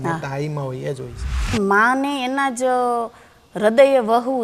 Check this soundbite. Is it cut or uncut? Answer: cut